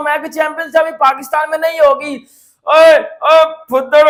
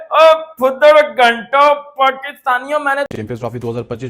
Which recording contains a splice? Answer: second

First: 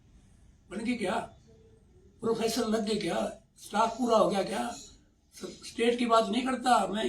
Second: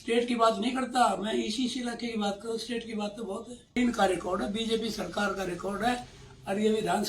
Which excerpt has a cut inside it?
second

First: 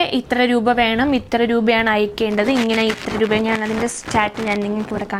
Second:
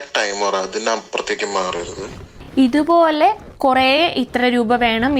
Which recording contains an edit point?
second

